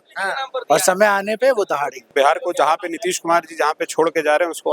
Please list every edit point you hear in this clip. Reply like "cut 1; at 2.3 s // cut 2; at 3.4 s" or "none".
cut 1; at 2.1 s